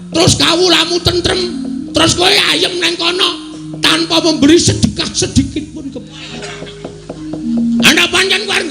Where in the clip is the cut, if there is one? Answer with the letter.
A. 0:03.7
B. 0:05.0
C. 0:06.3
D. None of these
C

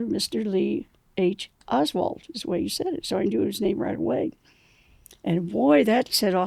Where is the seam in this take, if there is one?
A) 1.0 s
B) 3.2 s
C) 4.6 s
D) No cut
D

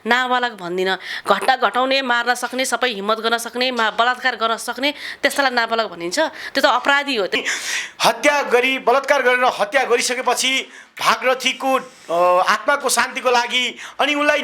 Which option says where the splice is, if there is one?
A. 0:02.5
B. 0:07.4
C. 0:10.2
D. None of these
B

